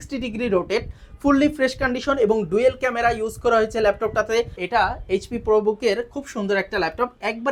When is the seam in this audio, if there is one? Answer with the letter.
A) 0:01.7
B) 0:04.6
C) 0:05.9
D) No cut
B